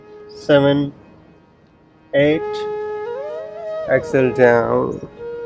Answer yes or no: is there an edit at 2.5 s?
yes